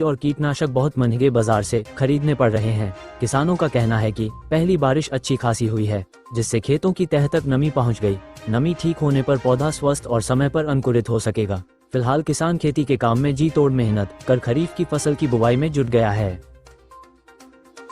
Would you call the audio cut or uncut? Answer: cut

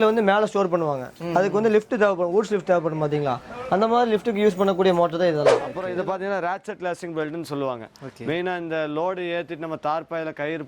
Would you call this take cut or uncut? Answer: cut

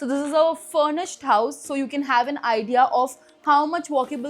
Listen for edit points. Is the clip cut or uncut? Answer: uncut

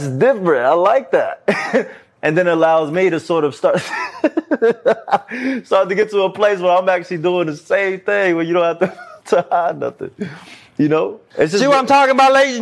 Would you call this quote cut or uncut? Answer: cut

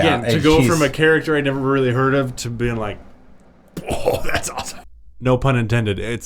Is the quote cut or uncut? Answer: cut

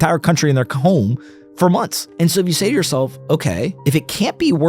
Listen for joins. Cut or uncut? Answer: cut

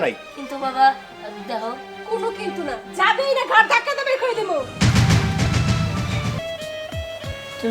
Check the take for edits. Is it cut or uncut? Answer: cut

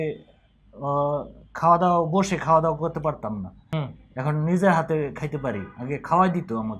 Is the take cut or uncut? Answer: cut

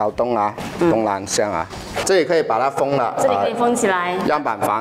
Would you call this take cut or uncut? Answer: cut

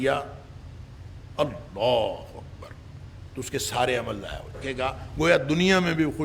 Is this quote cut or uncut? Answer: cut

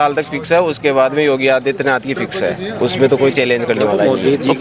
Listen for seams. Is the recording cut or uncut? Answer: uncut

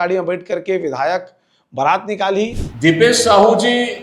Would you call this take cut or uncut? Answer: cut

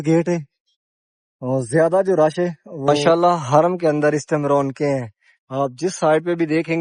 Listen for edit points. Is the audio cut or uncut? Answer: cut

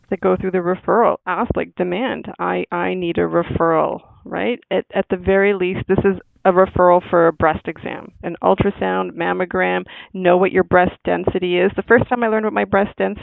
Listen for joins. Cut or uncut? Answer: uncut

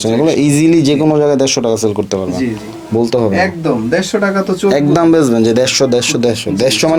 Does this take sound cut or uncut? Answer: uncut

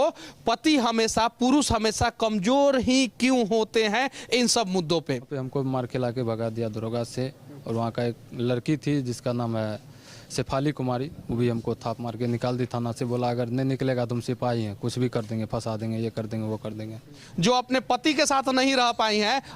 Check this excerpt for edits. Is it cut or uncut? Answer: cut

